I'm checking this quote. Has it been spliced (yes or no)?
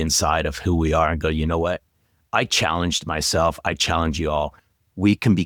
no